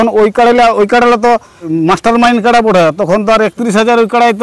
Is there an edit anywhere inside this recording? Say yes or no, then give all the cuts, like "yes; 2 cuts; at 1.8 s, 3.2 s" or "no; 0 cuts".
yes; 1 cut; at 1.7 s